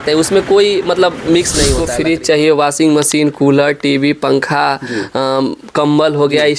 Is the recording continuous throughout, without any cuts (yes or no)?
no